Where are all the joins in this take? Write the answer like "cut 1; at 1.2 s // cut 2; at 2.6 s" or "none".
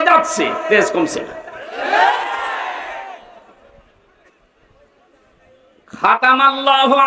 none